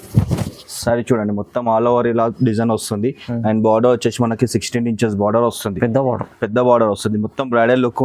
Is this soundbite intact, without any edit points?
yes; 0 cuts

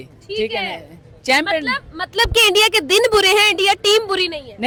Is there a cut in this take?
no; 0 cuts

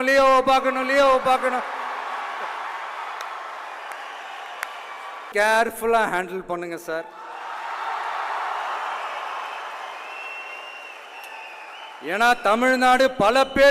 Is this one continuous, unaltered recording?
no; 1 cut; at 5.3 s

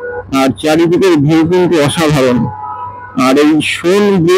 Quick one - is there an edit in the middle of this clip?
no; 0 cuts

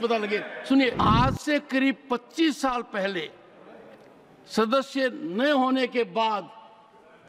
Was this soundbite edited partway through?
yes; 1 cut; at 1.0 s

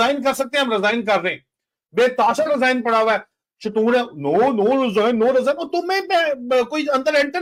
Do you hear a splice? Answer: no; 0 cuts

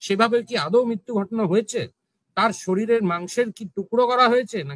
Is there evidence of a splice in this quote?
no; 0 cuts

